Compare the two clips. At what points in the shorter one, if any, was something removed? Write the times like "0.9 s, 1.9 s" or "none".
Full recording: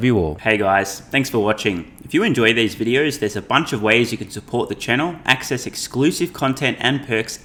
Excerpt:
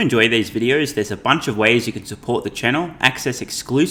none